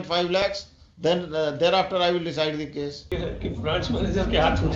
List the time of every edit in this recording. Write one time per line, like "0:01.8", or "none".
0:03.1

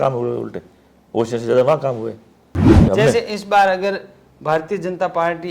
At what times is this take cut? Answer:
0:02.7

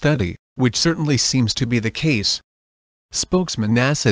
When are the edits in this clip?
none

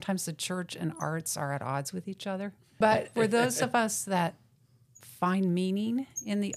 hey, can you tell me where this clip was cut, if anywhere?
0:03.0

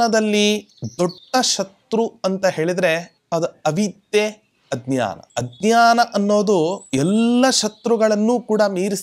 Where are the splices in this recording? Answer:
0:01.1
0:03.1
0:05.2
0:06.8

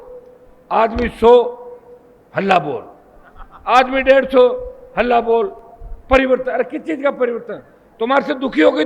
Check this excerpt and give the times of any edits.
none

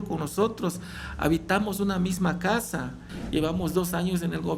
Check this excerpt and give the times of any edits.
0:03.1

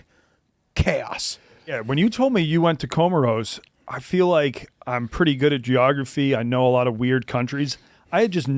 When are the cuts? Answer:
0:01.8

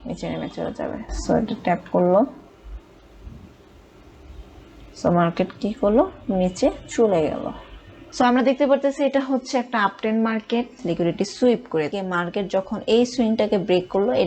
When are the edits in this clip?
0:08.0
0:10.8
0:12.0

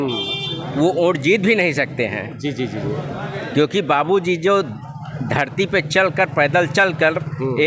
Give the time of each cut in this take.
none

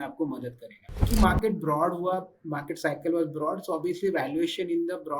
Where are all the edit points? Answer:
0:01.1

